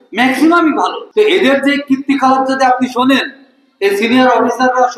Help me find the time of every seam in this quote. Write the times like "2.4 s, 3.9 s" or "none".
1.0 s